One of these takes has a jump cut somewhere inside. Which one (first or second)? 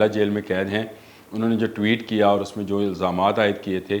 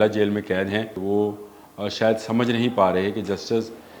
second